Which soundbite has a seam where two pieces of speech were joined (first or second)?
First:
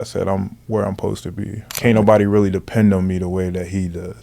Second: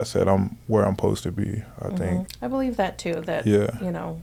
first